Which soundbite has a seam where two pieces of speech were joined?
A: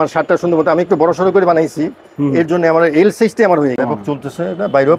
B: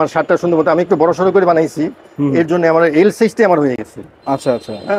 A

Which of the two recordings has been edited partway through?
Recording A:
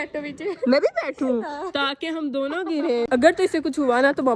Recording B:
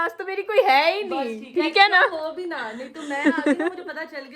A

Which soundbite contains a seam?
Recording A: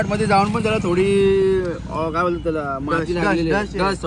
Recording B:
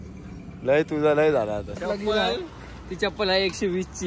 B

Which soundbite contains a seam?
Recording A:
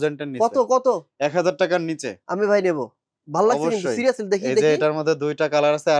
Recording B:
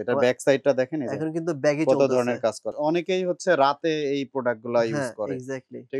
B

